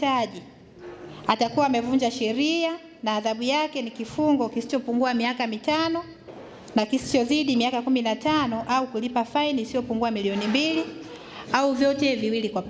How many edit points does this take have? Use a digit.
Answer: 0